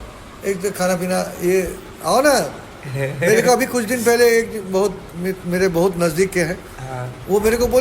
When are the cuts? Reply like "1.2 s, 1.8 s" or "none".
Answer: none

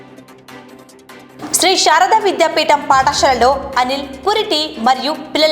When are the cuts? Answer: none

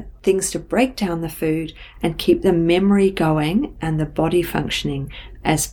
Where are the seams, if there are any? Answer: none

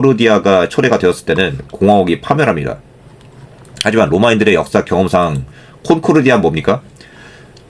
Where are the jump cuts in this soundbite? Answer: none

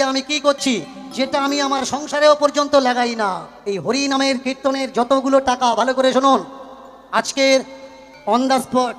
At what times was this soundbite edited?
3.5 s

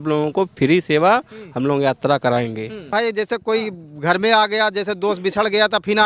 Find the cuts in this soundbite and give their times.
2.8 s

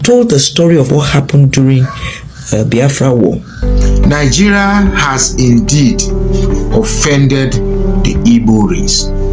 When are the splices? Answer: 3.6 s

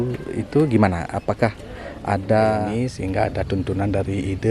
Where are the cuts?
2.7 s

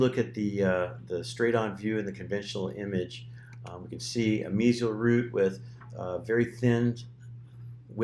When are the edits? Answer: 1.2 s

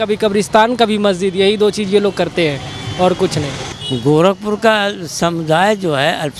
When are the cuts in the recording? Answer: 3.7 s

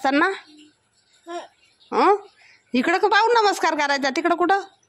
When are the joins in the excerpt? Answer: none

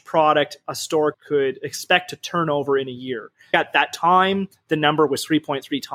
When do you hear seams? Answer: 1.2 s, 3.5 s

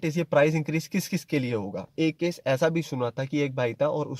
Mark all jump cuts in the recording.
1.9 s

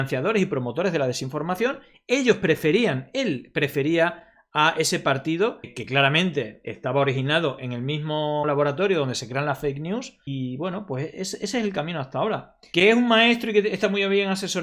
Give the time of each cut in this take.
12.5 s

